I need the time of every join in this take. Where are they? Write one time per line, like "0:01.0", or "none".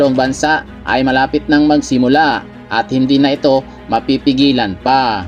none